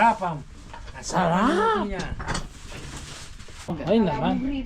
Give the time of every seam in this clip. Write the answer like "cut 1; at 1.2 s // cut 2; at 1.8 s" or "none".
cut 1; at 3.7 s